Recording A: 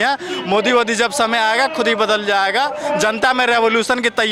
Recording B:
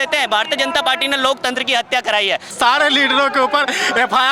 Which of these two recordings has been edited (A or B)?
B